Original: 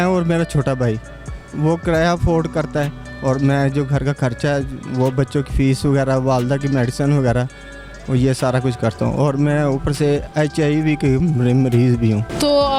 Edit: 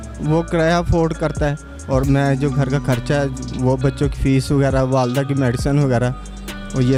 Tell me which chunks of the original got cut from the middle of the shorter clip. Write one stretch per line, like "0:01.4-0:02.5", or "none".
none